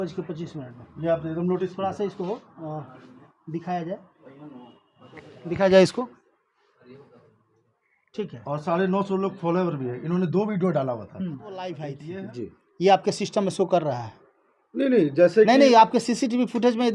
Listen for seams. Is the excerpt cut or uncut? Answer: cut